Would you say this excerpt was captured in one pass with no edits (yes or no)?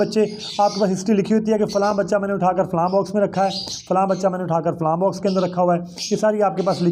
yes